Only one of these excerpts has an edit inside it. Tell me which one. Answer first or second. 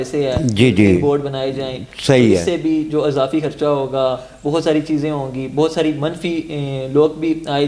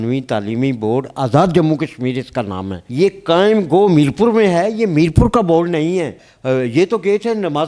second